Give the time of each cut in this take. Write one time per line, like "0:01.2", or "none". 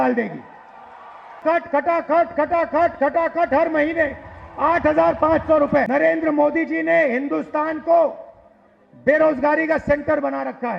0:01.4
0:05.9